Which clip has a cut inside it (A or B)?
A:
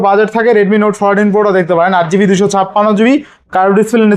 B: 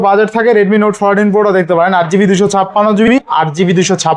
B